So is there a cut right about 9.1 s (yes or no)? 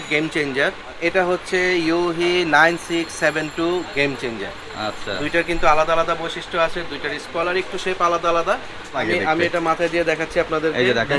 yes